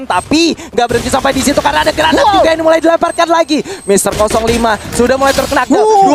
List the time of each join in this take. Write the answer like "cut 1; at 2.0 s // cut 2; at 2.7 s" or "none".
none